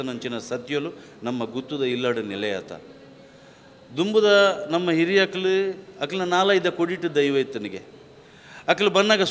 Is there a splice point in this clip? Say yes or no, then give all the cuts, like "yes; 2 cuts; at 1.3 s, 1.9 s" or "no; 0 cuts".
no; 0 cuts